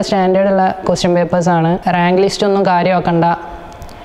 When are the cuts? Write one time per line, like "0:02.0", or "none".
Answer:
0:01.8

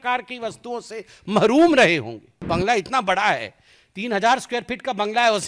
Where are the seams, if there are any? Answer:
0:02.3

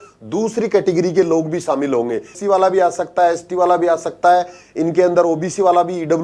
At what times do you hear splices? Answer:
0:02.3

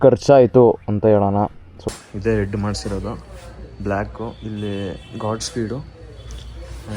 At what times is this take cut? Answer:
0:01.8

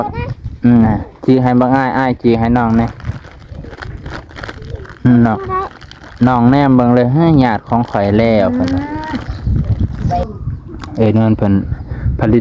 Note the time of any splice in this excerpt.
0:09.3

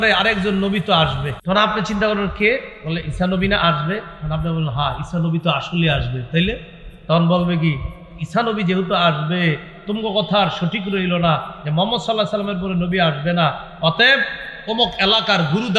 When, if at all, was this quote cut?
0:01.3

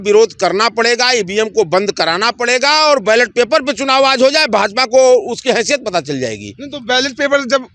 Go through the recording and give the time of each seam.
none

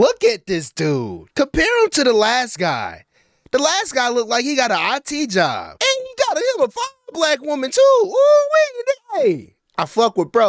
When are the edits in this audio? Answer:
none

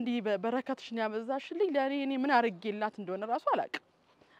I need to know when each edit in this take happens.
none

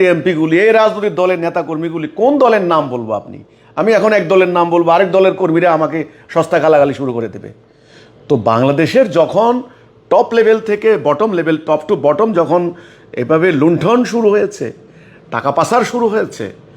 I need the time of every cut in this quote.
none

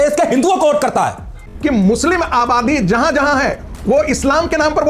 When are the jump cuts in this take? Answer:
0:01.4

